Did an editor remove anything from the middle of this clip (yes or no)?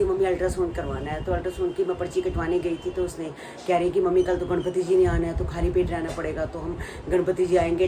no